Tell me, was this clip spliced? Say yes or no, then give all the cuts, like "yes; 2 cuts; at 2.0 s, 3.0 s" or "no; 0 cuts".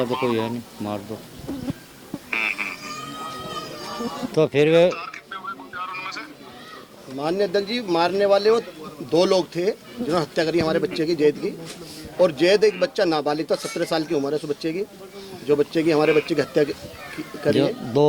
no; 0 cuts